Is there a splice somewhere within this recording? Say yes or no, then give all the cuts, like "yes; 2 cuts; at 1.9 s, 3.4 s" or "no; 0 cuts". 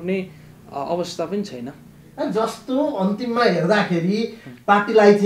no; 0 cuts